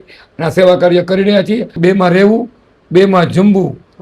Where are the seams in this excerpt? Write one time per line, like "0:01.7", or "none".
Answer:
0:01.7